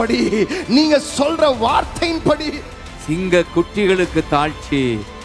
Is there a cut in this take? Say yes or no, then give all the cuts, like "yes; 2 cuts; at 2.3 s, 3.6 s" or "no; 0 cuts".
yes; 1 cut; at 2.7 s